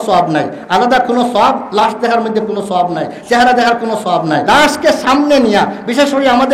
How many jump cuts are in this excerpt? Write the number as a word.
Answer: one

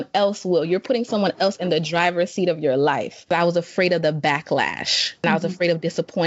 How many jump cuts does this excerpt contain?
two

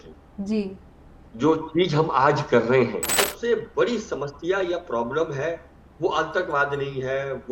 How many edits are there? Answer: one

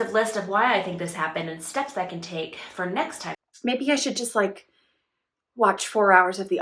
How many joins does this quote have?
one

